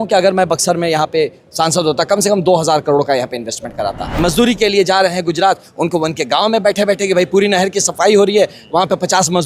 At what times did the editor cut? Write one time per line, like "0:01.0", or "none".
0:04.2